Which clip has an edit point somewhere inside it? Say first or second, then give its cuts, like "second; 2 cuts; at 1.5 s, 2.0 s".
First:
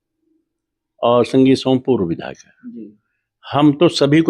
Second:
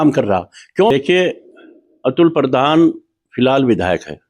second; 1 cut; at 0.9 s